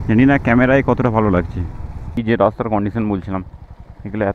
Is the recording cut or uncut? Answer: cut